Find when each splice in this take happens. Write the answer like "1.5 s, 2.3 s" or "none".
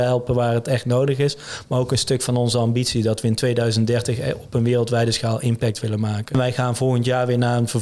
6.3 s